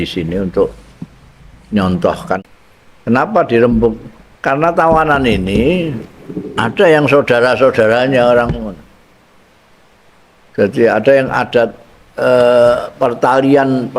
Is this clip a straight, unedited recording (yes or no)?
no